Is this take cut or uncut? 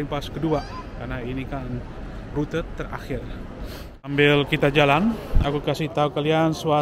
cut